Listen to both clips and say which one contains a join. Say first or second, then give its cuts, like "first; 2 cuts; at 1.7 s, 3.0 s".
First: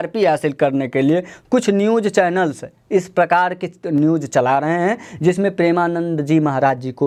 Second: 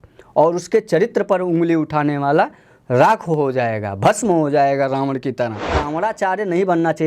second; 1 cut; at 5.7 s